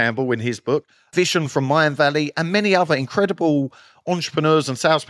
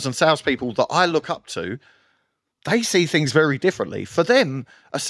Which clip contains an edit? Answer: first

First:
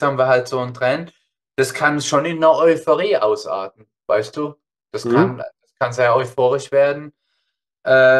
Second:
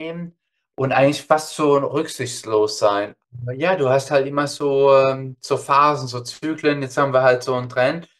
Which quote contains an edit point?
second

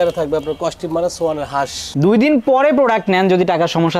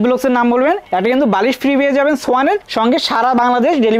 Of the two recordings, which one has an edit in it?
first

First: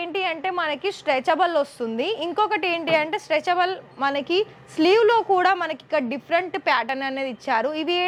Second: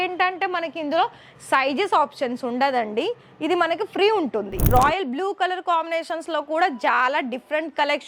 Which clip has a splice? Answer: second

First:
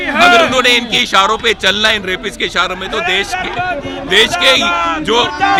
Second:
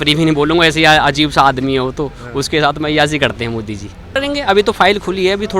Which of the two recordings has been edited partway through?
second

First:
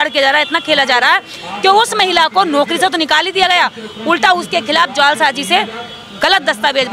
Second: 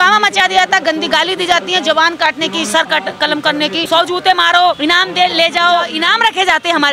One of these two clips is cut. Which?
second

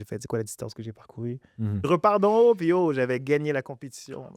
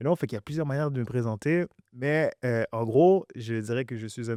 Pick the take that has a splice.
first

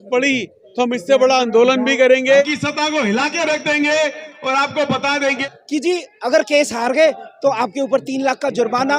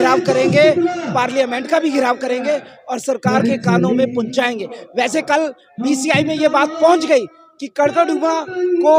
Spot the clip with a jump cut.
first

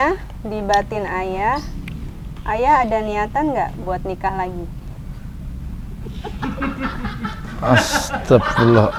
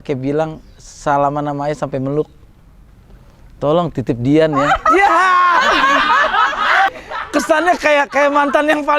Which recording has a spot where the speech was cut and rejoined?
second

